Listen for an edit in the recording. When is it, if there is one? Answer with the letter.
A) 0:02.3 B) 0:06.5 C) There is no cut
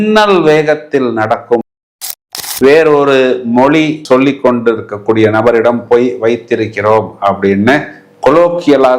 A